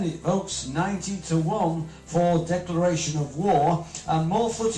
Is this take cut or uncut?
cut